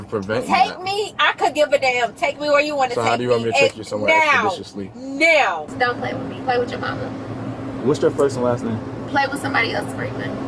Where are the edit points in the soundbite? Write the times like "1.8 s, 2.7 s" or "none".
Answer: 5.7 s